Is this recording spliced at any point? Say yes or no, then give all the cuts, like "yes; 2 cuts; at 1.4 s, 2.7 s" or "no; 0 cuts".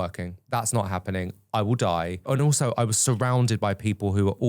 yes; 1 cut; at 2.3 s